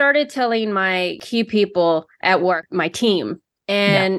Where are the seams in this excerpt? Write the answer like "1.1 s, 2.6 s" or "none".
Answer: 1.2 s, 2.1 s